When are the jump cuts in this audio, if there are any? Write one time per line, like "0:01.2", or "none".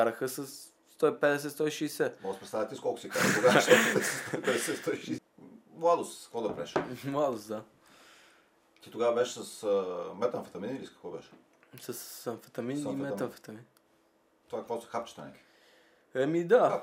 0:05.2